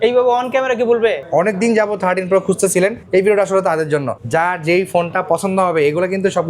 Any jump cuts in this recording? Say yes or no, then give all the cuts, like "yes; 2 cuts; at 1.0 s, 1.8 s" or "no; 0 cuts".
yes; 3 cuts; at 1.2 s, 3.0 s, 4.1 s